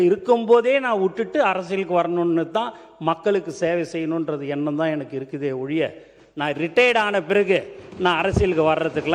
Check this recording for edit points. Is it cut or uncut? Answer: uncut